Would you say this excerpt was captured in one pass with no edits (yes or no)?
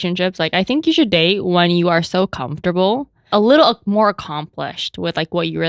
no